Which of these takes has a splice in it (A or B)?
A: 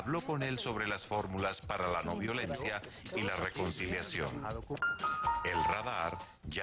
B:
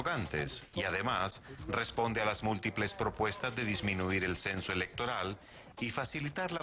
A